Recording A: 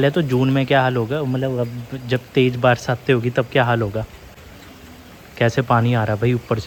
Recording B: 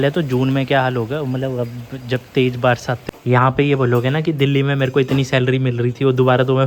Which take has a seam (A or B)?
B